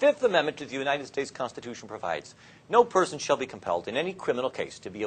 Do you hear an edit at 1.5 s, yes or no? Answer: no